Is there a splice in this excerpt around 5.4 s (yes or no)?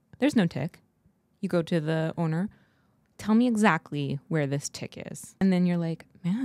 yes